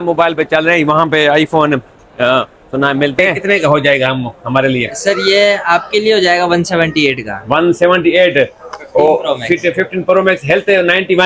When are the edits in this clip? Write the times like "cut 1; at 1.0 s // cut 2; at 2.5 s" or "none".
cut 1; at 3.3 s